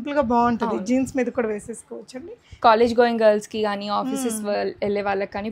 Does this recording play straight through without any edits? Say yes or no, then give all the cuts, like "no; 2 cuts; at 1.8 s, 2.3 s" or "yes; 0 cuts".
yes; 0 cuts